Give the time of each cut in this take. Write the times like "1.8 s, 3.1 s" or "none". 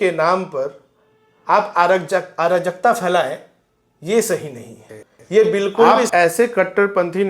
5.9 s

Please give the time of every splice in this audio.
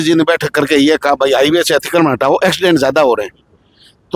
none

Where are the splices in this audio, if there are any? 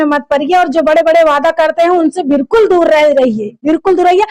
none

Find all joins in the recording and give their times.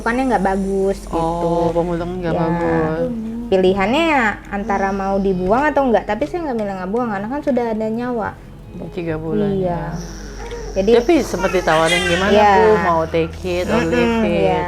none

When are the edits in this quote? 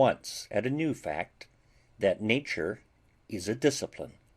1.7 s

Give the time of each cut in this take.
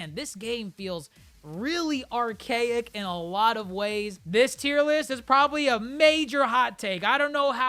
4.1 s

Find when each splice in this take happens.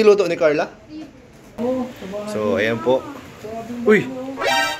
1.6 s

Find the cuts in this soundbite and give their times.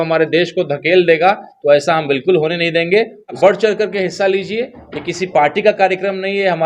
3.2 s

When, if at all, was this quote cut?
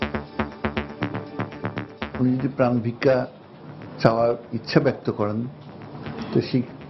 1.9 s

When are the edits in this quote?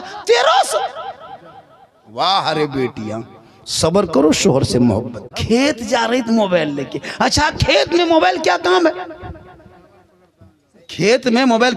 5.3 s

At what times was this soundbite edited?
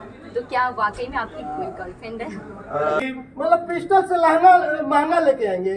3.0 s

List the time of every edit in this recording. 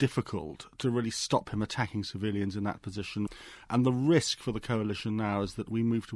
3.3 s

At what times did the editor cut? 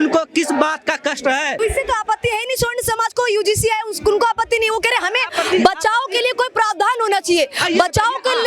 1.6 s

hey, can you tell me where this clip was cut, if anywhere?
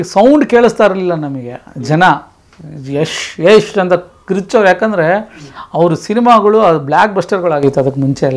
none

